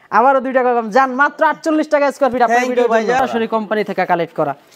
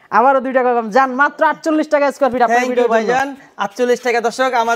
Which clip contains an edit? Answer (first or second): first